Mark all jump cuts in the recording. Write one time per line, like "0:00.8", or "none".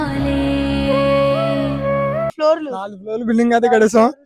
0:02.3